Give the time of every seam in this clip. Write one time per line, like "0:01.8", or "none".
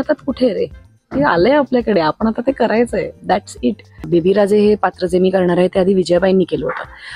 0:04.0